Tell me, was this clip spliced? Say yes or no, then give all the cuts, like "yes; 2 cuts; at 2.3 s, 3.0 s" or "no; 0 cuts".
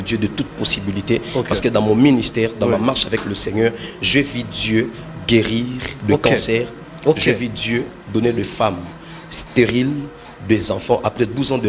no; 0 cuts